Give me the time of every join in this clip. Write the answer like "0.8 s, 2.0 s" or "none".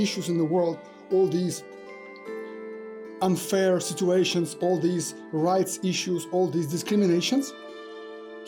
none